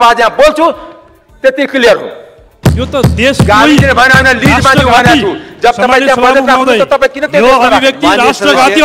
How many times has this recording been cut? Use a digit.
1